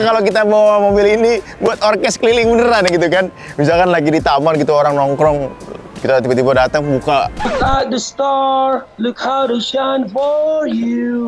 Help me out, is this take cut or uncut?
uncut